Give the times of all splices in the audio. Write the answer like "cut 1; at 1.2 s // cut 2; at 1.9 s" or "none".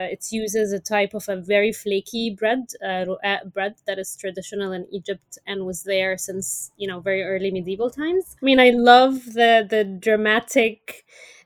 cut 1; at 8.3 s